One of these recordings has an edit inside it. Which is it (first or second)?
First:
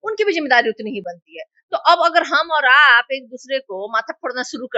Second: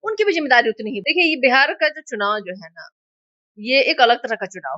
second